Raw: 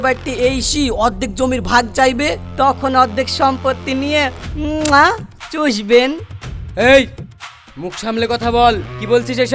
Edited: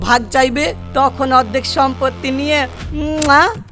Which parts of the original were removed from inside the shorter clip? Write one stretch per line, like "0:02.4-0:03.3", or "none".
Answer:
none